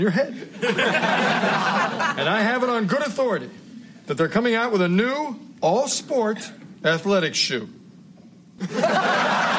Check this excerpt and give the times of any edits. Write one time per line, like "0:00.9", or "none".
0:01.4
0:08.6